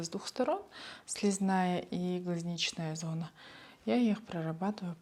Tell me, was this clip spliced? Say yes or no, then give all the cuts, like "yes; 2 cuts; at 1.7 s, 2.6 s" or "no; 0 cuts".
no; 0 cuts